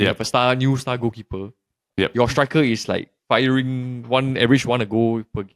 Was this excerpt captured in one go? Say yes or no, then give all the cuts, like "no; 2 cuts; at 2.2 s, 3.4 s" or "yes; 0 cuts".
yes; 0 cuts